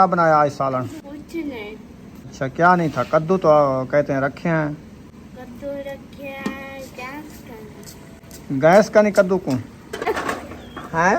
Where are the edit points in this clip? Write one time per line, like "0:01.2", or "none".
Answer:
0:01.0
0:02.3
0:10.1